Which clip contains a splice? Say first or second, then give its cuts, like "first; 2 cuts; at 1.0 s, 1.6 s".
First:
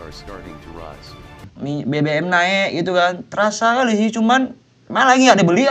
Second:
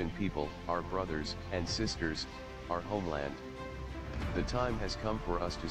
first; 1 cut; at 1.5 s